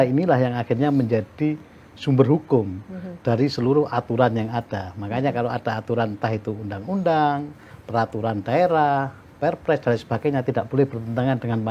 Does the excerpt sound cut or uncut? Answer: uncut